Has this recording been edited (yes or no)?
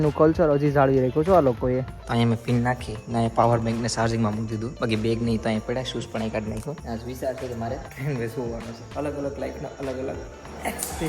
yes